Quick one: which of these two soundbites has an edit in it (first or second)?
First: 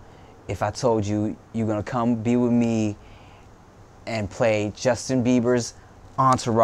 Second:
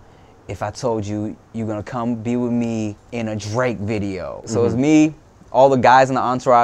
second